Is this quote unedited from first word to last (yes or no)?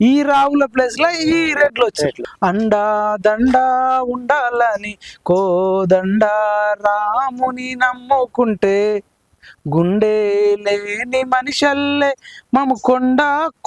no